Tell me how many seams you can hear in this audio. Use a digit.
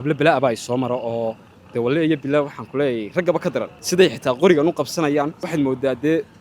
2